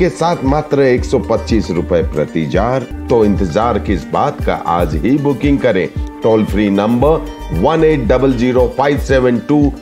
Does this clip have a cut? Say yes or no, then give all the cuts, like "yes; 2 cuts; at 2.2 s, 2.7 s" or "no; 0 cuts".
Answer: yes; 1 cut; at 2.9 s